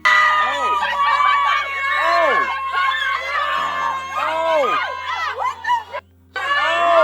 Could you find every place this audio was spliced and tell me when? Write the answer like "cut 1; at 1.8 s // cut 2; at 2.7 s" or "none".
none

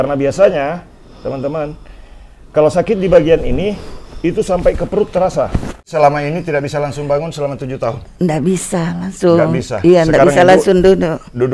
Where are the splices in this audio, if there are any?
cut 1; at 5.8 s

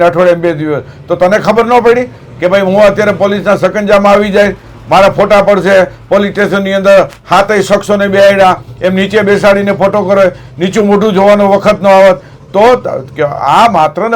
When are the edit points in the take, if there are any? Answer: none

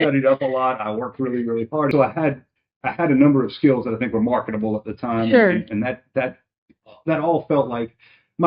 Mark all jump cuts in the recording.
cut 1; at 1.9 s

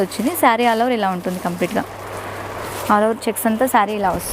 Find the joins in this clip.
none

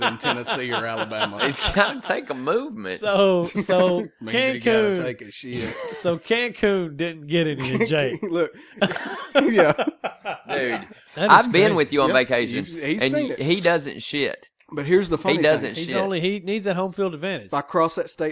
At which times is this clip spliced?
cut 1; at 11.0 s

